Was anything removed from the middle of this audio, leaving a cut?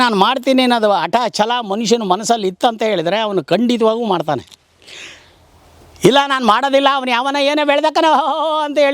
no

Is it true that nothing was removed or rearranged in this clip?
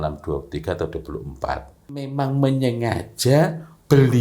no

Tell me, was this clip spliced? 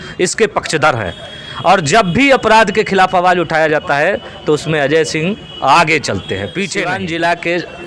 yes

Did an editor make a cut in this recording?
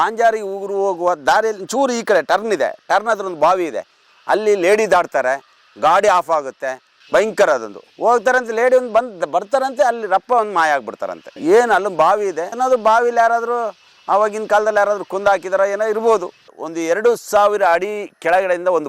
yes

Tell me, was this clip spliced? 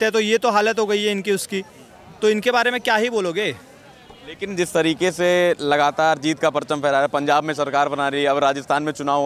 no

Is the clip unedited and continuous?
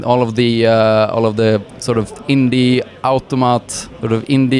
yes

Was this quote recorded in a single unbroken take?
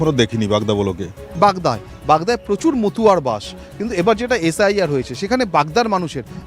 yes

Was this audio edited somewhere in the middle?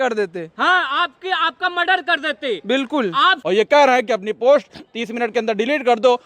yes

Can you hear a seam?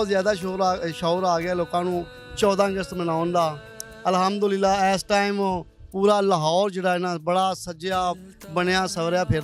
no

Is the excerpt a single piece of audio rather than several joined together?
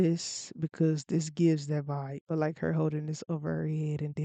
no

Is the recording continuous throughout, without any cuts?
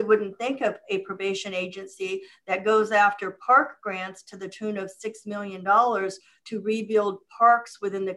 yes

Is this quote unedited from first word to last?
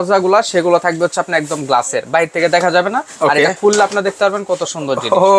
yes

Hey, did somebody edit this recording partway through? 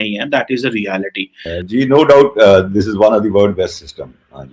yes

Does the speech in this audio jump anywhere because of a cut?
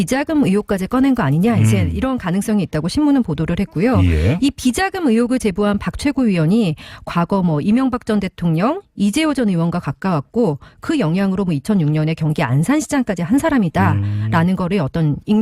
no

